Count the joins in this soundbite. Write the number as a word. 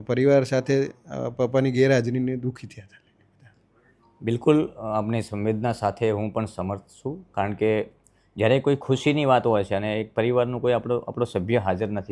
zero